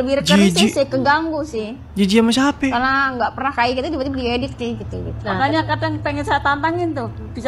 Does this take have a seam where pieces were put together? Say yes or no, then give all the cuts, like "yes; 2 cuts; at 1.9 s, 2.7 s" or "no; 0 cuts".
no; 0 cuts